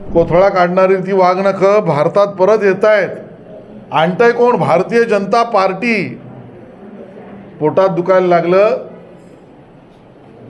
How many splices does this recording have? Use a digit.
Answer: 0